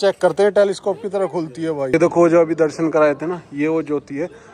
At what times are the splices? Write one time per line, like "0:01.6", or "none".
0:01.9

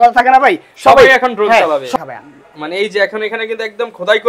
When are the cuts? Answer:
0:01.9

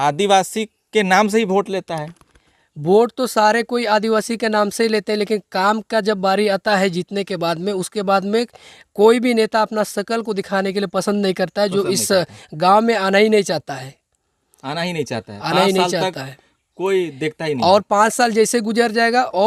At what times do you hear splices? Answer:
none

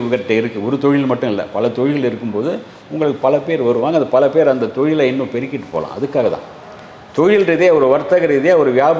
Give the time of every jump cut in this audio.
none

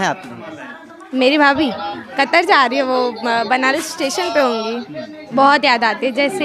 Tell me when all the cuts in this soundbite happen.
0:05.2

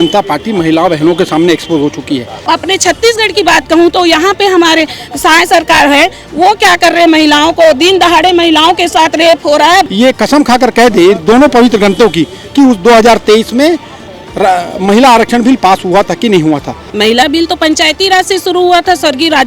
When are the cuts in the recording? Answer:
0:02.4
0:09.9
0:16.8

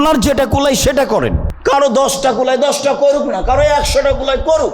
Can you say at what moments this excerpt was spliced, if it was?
0:01.5

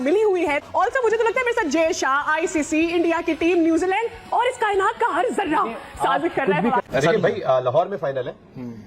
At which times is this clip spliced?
0:06.9
0:07.9

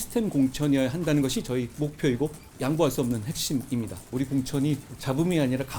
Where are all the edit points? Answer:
0:01.7
0:02.4
0:04.1
0:04.9

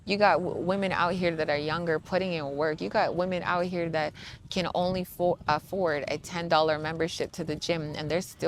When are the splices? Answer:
none

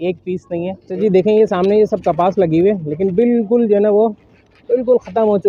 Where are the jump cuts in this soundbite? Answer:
0:01.0

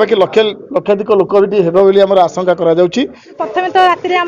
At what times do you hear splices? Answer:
0:03.4

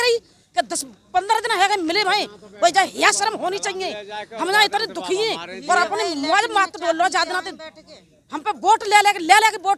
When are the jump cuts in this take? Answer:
none

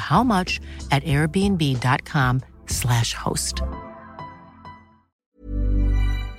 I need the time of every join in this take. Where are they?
0:05.2

